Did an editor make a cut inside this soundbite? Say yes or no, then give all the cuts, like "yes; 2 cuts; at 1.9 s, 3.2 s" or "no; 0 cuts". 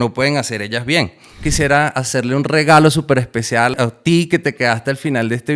yes; 2 cuts; at 1.4 s, 3.7 s